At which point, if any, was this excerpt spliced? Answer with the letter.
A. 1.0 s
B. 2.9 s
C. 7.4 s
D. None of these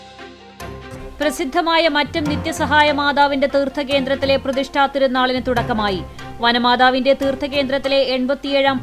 A